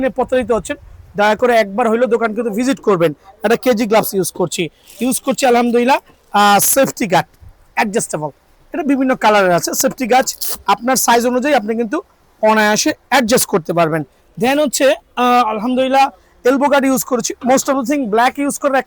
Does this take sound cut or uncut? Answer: uncut